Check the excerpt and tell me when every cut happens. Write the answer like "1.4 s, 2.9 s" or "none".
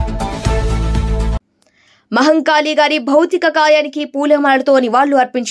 1.3 s